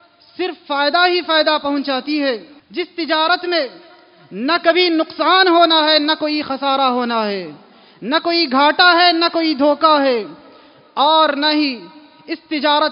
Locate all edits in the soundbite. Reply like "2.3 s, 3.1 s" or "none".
2.6 s